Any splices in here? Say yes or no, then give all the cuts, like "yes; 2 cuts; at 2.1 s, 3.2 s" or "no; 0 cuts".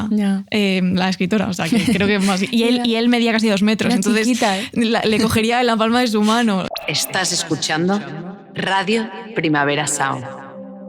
yes; 1 cut; at 6.7 s